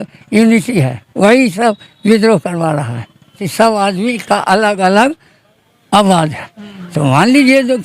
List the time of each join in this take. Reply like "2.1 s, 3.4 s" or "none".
3.5 s